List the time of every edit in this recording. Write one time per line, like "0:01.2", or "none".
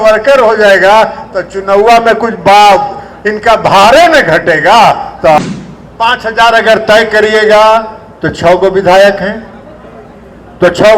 0:05.4